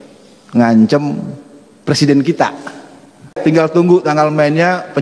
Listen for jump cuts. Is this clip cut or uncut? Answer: cut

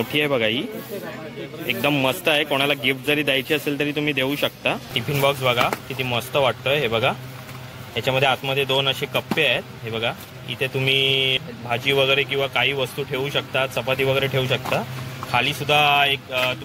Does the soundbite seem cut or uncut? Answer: cut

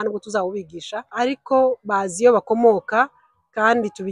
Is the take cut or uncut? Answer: cut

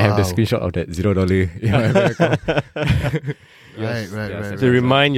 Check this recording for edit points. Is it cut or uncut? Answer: uncut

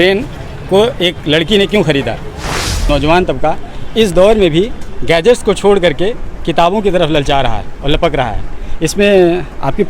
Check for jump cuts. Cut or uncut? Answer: cut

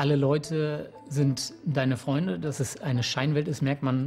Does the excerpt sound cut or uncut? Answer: uncut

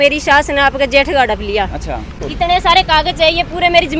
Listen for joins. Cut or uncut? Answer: cut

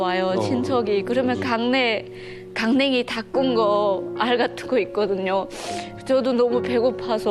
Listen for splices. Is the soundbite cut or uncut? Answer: uncut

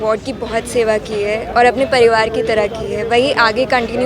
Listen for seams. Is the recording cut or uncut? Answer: uncut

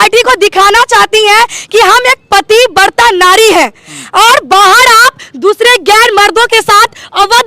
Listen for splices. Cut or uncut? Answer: uncut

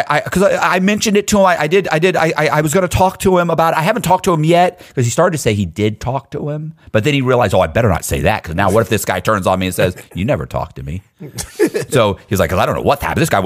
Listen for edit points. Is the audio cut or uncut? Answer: uncut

